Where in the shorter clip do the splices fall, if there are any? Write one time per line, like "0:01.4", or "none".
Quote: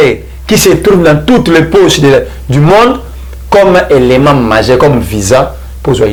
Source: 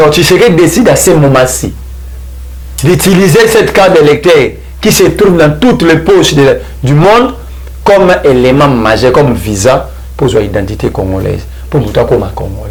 none